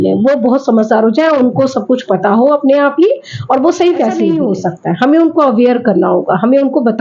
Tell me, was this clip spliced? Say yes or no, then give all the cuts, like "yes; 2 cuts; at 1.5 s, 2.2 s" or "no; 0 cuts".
yes; 1 cut; at 4.3 s